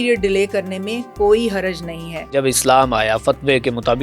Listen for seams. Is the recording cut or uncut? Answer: cut